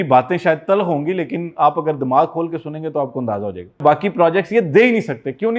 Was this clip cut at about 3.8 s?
yes; 1 cut; at 3.8 s

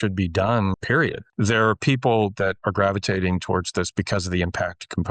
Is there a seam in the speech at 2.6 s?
yes; 2 cuts; at 0.8 s, 2.6 s

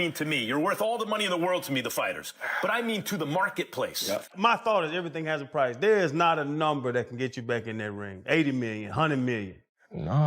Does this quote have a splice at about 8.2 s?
no; 1 cut; at 4.3 s

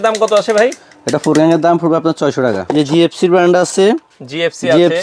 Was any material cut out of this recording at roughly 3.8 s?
no; 1 cut; at 2.6 s

